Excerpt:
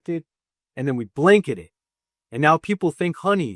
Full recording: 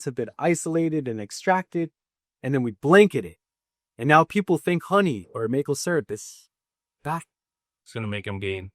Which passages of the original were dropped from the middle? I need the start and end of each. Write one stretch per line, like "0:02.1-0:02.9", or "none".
none